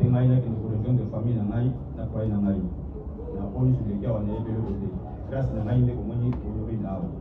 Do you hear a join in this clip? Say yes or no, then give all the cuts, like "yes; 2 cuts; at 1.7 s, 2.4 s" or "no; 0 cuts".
no; 0 cuts